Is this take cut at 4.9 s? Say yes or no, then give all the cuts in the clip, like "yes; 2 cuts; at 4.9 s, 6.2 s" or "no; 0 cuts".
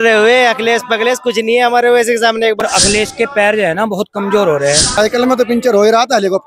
yes; 2 cuts; at 2.6 s, 4.9 s